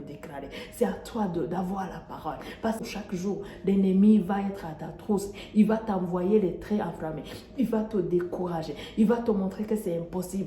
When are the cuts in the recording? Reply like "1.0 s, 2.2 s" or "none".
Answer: 2.8 s